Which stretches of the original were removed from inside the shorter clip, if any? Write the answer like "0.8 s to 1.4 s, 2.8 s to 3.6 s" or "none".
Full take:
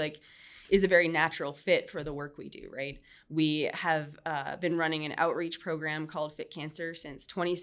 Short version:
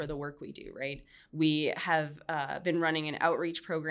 none